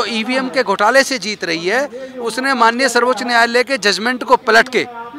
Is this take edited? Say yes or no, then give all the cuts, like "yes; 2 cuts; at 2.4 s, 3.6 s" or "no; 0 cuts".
no; 0 cuts